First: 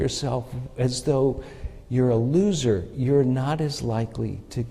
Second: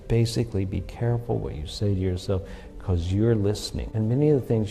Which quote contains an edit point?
second; 1 cut; at 3.8 s

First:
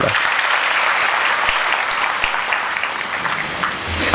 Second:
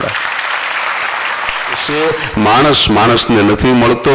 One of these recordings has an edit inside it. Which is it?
second; 1 cut; at 1.9 s

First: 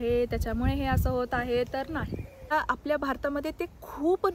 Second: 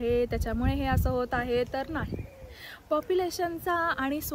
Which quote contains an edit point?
first; 1 cut; at 2.5 s

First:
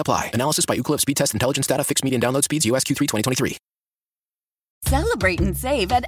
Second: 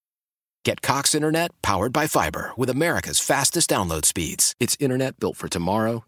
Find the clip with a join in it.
first; 1 cut; at 4.7 s

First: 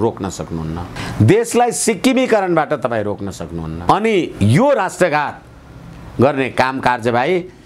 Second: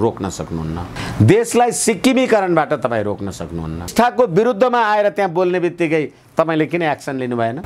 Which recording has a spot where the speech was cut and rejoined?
second; 1 cut; at 3.9 s

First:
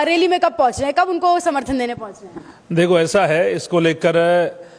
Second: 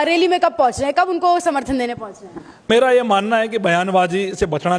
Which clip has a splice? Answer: second; 1 cut; at 2.6 s

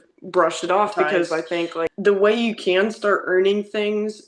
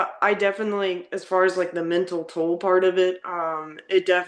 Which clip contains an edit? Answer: first; 1 cut; at 1.9 s

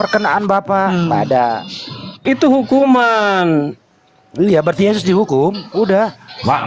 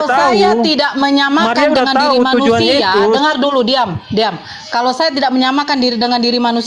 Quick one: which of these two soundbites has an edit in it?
first; 1 cut; at 2.2 s

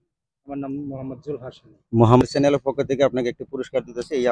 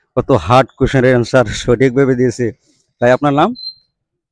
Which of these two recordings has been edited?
first; 1 cut; at 2.2 s

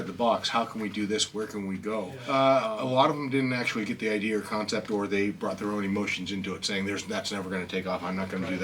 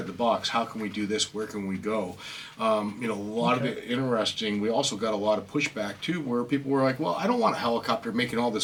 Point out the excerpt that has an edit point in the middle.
first; 1 cut; at 2.2 s

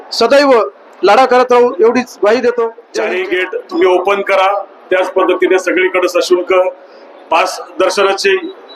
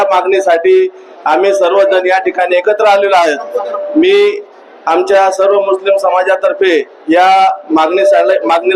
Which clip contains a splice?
first; 1 cut; at 2.8 s

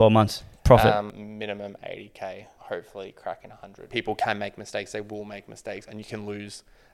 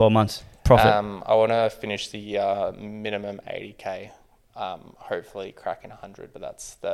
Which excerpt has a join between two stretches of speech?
first; 3 cuts; at 1.2 s, 2.5 s, 3.8 s

